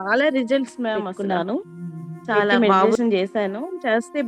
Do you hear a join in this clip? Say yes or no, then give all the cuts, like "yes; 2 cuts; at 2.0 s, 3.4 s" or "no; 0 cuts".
yes; 1 cut; at 1.1 s